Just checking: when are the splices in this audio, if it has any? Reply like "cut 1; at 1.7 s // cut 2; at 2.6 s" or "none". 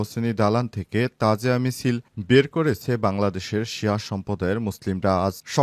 none

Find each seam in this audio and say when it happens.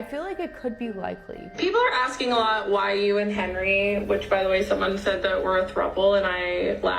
cut 1; at 1.4 s

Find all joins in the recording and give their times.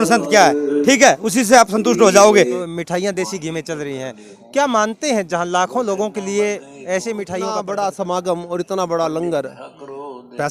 cut 1; at 2.5 s // cut 2; at 7.5 s

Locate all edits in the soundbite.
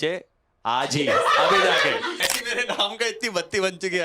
cut 1; at 2.2 s

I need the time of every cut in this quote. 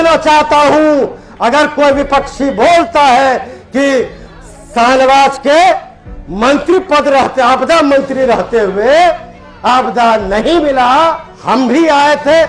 cut 1; at 11.3 s

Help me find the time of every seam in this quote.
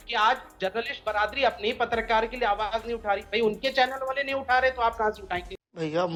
none

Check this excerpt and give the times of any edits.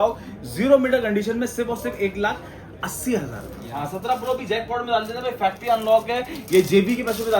cut 1; at 3.7 s

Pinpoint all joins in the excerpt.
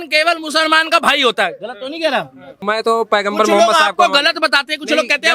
cut 1; at 2.6 s

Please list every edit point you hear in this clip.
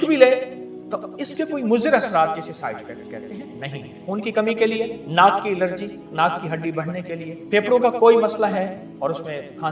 cut 1; at 4.0 s // cut 2; at 5.0 s // cut 3; at 6.1 s // cut 4; at 7.3 s // cut 5; at 8.9 s

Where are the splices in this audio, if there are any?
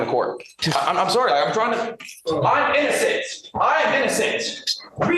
cut 1; at 2.2 s

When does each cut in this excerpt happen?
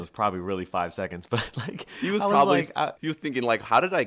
cut 1; at 3.0 s

